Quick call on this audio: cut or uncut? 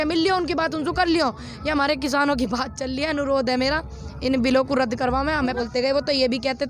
cut